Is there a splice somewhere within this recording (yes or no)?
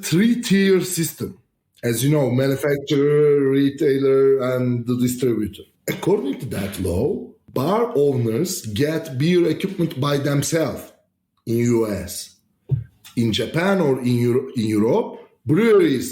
yes